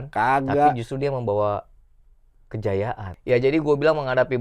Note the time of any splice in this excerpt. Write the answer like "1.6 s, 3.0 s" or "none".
3.0 s